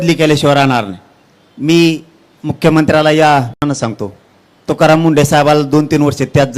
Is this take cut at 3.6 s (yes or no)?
yes